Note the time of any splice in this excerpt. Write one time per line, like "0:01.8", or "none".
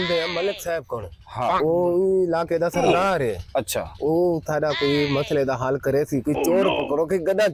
none